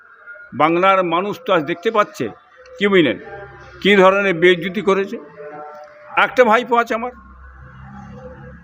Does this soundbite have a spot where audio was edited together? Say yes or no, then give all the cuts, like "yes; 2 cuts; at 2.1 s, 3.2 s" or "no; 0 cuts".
yes; 1 cut; at 6.0 s